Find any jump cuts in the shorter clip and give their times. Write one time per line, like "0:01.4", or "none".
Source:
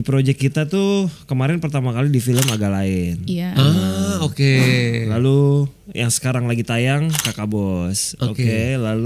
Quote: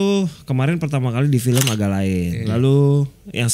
0:02.4